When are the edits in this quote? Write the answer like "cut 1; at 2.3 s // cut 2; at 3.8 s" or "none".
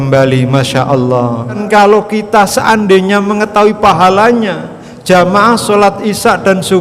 cut 1; at 1.6 s

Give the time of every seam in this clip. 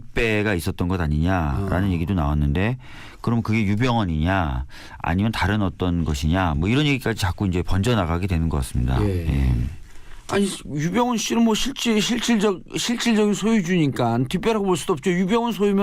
cut 1; at 13.4 s

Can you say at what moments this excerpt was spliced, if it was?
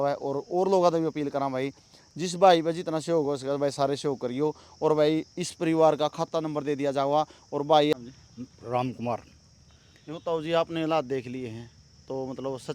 cut 1; at 7.9 s

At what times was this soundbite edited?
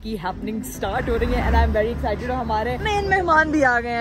none

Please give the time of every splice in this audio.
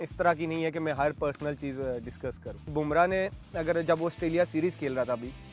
cut 1; at 2.7 s

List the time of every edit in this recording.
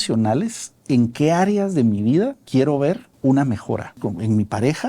cut 1; at 2.7 s // cut 2; at 4.0 s

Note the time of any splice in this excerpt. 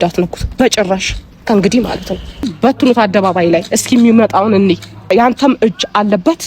cut 1; at 2.5 s // cut 2; at 5.1 s

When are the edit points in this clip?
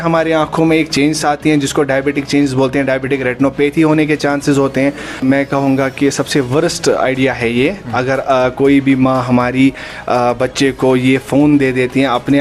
cut 1; at 5.2 s

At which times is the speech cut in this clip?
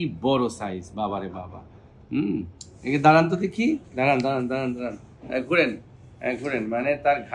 none

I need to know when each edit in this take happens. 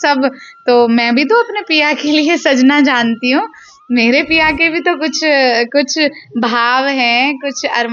none

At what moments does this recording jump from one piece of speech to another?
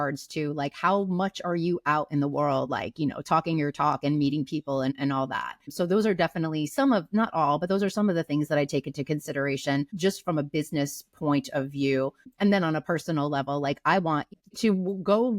cut 1; at 12.3 s // cut 2; at 14.4 s

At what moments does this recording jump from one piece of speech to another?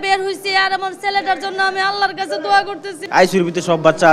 cut 1; at 3.0 s

